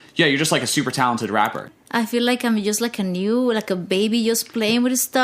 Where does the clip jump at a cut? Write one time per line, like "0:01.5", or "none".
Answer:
0:01.7